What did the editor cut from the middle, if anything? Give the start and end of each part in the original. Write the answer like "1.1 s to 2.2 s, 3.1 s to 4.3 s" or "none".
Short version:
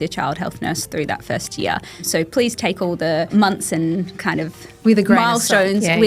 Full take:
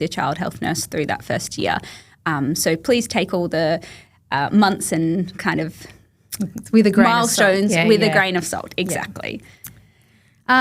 2.1 s to 2.6 s, 3.8 s to 4.5 s, 5.9 s to 6.5 s